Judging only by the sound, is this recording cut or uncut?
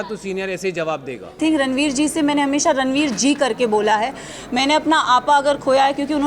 cut